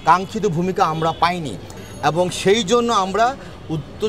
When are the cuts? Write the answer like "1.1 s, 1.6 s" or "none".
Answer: 1.8 s